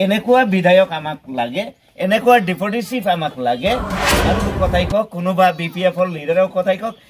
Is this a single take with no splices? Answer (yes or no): no